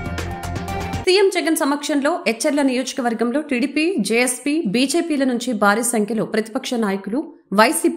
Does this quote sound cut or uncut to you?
cut